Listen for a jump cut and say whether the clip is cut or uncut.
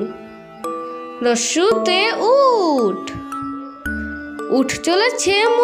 cut